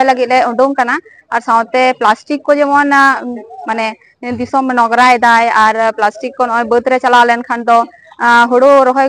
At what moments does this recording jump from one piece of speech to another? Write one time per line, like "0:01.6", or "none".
none